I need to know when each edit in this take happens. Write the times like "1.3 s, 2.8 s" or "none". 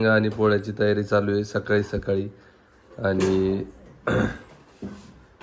none